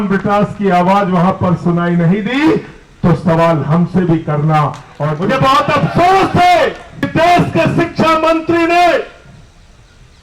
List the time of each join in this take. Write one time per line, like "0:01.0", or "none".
0:05.1
0:07.1